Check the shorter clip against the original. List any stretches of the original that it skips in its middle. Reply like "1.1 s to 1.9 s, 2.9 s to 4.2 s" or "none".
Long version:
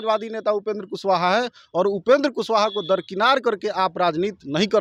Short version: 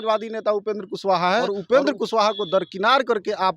1.5 s to 1.9 s